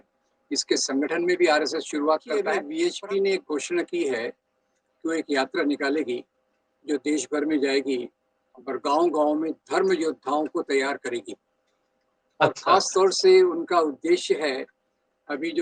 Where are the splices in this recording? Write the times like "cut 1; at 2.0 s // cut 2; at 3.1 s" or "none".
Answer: cut 1; at 2.6 s

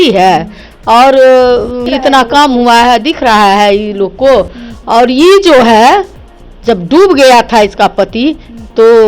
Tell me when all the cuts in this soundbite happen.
cut 1; at 1.8 s

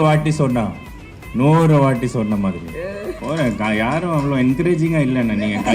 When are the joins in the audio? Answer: cut 1; at 3.2 s

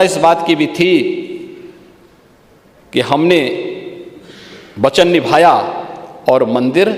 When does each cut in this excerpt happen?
none

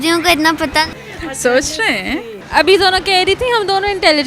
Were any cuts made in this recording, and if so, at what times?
cut 1; at 0.9 s // cut 2; at 2.3 s

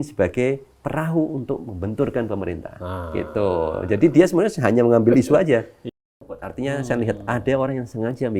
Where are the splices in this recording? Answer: cut 1; at 6.3 s

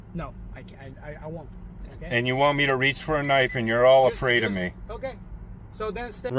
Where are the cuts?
none

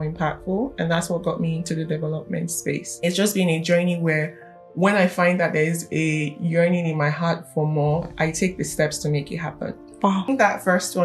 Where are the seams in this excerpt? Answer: cut 1; at 2.9 s // cut 2; at 10.3 s

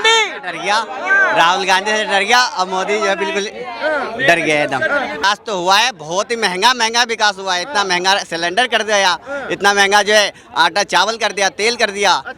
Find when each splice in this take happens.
cut 1; at 5.2 s

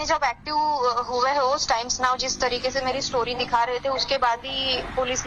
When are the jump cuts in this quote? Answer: none

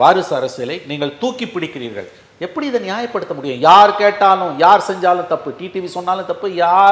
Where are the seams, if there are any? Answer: none

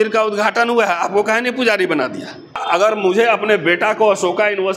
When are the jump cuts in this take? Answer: cut 1; at 2.6 s

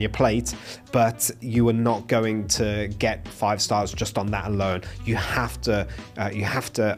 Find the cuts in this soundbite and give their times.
none

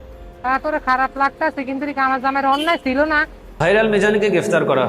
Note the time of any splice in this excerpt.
cut 1; at 3.5 s

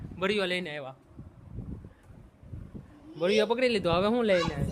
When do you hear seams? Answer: none

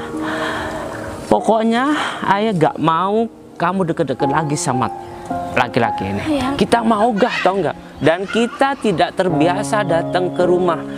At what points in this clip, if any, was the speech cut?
cut 1; at 6.5 s

